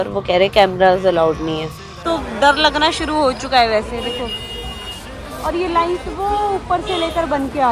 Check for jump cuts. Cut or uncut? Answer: cut